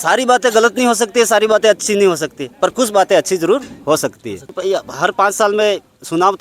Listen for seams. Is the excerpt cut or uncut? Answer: cut